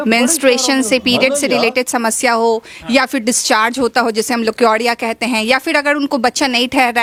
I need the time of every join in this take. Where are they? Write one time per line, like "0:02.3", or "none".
none